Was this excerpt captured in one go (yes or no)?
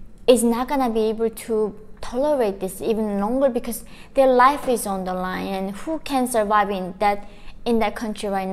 yes